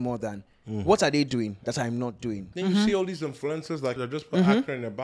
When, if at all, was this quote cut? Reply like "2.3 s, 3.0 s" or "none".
2.5 s, 4.0 s